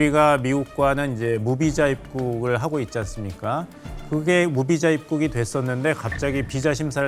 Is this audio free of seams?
yes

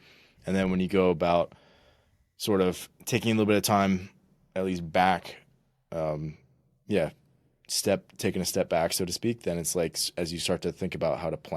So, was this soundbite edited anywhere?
no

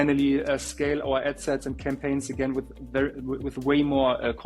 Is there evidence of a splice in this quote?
no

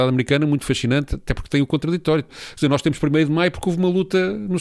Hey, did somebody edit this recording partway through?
no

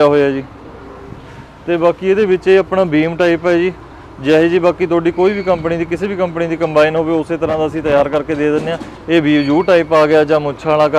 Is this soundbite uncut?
yes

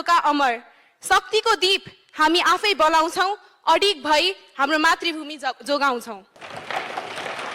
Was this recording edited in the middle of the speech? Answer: yes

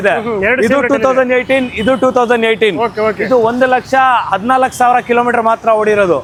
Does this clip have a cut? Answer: no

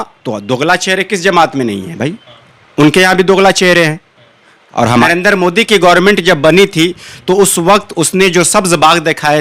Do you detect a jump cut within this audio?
yes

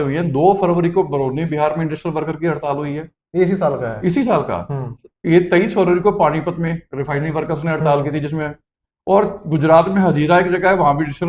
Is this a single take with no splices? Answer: yes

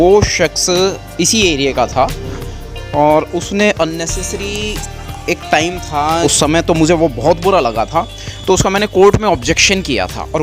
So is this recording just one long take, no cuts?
no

